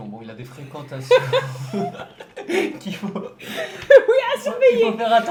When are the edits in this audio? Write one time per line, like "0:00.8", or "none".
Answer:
none